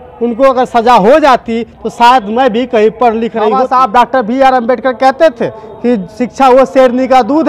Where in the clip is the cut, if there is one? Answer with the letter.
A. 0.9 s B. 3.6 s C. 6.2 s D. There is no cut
B